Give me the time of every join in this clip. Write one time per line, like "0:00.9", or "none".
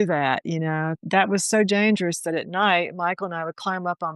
0:01.0